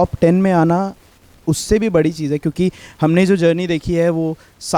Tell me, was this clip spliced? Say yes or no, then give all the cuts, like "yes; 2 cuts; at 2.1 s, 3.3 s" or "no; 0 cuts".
no; 0 cuts